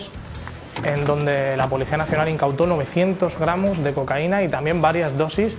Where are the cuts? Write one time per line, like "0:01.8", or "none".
none